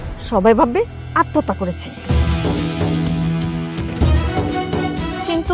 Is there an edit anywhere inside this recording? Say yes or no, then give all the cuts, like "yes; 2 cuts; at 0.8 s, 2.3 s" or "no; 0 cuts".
no; 0 cuts